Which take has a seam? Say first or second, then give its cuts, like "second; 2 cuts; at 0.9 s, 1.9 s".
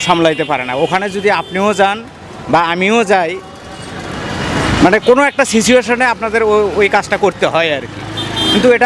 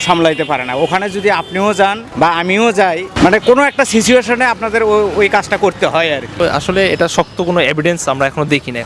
second; 3 cuts; at 2.0 s, 3.1 s, 6.3 s